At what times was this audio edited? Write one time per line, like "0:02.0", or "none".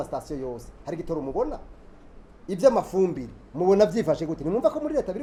none

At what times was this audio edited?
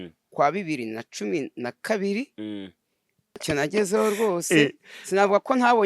0:03.4

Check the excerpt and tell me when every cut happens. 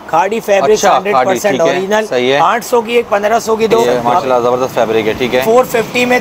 0:03.8

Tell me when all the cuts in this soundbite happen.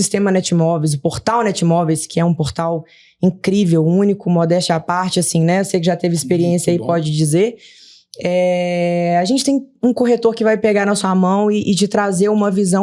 none

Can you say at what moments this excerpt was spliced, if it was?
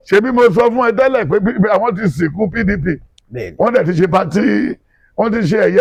none

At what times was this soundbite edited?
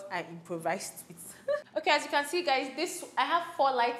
none

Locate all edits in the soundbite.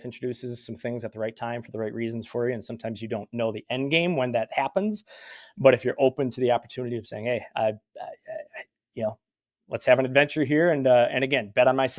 none

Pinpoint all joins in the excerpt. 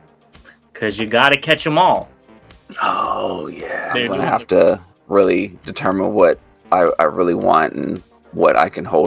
0:04.1

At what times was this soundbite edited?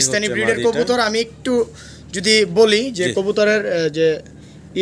none

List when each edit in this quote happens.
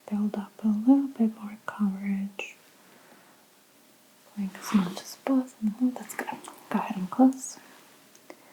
0:03.7

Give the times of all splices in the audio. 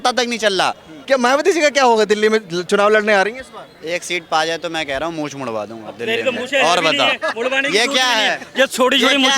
0:00.9

